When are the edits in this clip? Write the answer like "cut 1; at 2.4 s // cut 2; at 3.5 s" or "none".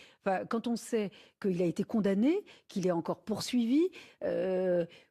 cut 1; at 2.4 s